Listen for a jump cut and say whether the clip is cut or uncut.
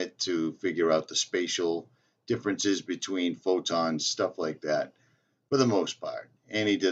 uncut